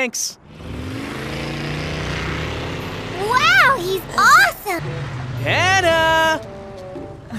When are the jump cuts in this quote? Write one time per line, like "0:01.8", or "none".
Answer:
0:04.8